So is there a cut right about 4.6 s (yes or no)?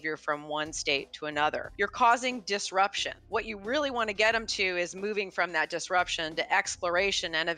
no